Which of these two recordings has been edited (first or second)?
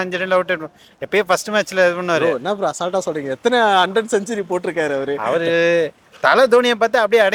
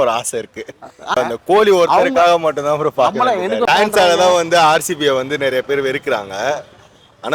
second